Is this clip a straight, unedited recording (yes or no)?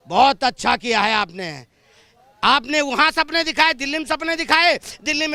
yes